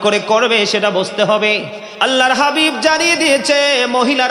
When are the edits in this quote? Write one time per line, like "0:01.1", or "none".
0:01.8